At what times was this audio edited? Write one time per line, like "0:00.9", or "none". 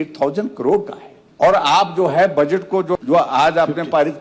0:03.0